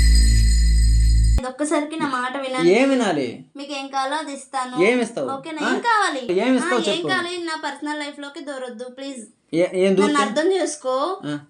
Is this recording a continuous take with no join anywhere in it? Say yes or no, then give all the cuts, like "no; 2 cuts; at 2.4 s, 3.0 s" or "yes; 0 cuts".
yes; 0 cuts